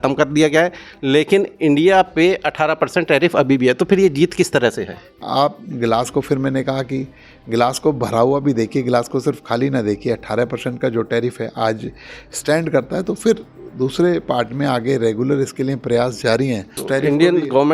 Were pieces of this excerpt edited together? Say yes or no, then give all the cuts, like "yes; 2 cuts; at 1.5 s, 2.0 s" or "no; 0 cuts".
yes; 2 cuts; at 5.2 s, 16.8 s